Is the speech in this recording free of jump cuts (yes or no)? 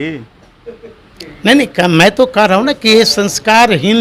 yes